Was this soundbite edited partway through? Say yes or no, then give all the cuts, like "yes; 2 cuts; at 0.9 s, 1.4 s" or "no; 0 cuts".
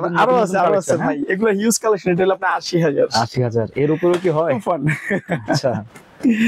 no; 0 cuts